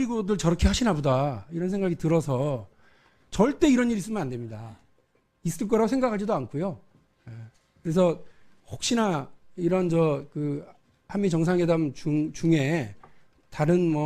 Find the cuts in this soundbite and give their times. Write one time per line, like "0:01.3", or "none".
0:11.6

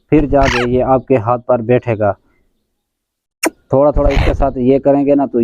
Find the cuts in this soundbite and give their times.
0:02.3

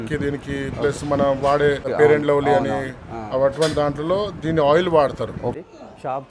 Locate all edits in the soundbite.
0:01.9
0:05.5

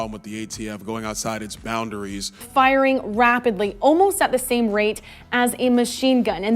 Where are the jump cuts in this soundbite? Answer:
0:02.4

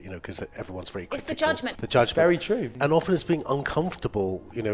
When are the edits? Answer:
0:01.8
0:02.7

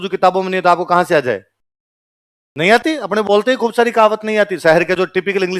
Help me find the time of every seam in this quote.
none

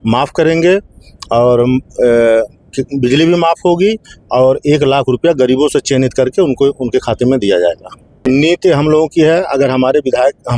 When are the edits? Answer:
0:08.2

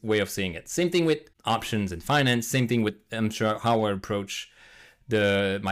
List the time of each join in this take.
0:01.3

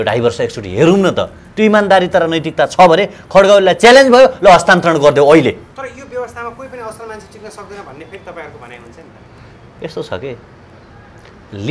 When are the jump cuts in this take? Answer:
none

